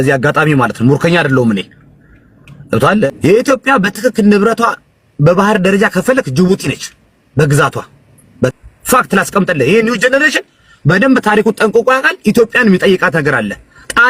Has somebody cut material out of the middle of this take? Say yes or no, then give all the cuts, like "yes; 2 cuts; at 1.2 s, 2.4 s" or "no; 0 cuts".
yes; 2 cuts; at 3.1 s, 8.5 s